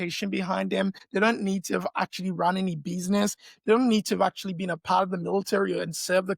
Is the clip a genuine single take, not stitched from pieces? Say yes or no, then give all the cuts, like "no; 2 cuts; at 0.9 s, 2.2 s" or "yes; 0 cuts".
no; 1 cut; at 1.0 s